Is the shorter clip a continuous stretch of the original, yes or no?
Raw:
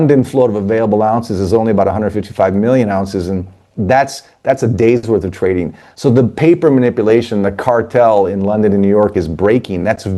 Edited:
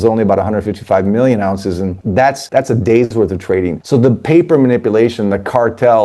no